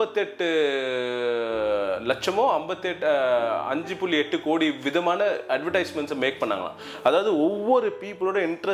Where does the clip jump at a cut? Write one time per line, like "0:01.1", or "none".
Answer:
none